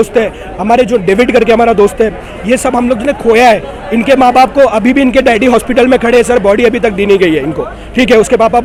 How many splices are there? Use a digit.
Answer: 0